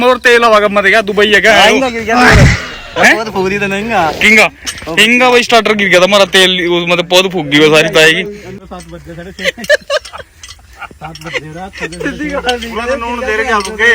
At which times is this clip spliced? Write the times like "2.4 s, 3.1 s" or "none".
none

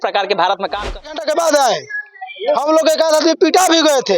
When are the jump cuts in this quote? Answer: 1.0 s

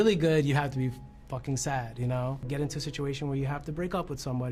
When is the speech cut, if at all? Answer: 2.4 s

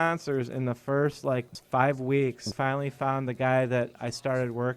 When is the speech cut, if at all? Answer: 1.6 s, 2.5 s

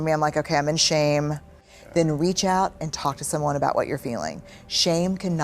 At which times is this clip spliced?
1.7 s

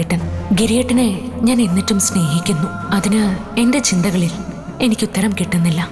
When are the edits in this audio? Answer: none

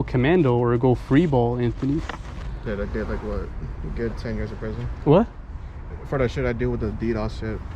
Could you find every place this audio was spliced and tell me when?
2.6 s

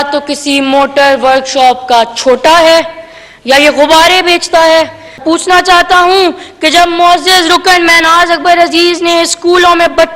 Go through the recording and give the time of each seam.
5.2 s

